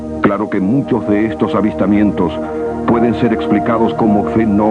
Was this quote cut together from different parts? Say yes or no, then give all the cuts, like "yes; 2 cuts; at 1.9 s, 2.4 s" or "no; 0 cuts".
yes; 1 cut; at 3.4 s